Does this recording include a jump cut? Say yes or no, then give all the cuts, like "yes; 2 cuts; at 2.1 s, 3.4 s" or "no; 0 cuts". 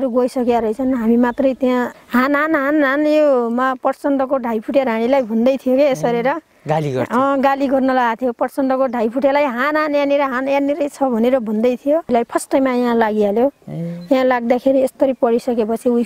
yes; 2 cuts; at 2.0 s, 12.1 s